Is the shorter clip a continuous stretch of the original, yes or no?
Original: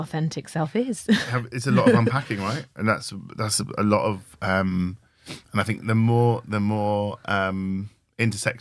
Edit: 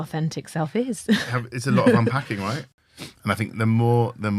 no